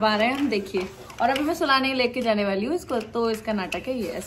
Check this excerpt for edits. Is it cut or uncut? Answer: uncut